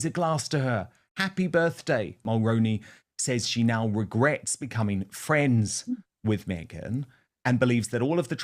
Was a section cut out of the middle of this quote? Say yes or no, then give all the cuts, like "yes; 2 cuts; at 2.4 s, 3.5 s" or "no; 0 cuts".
yes; 1 cut; at 1.8 s